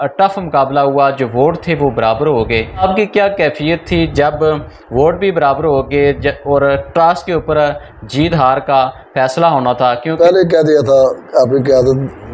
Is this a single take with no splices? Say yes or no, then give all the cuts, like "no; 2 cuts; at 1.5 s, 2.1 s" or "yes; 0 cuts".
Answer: no; 2 cuts; at 2.8 s, 10.2 s